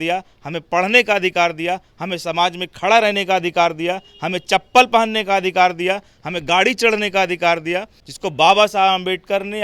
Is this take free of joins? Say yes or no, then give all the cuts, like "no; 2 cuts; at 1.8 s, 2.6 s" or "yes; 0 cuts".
no; 1 cut; at 8.0 s